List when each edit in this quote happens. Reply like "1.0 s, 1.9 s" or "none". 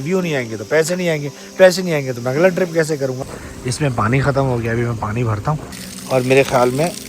3.2 s, 5.5 s